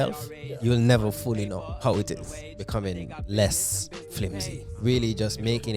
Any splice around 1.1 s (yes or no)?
no